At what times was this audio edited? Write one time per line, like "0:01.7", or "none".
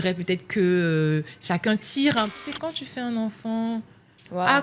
0:02.2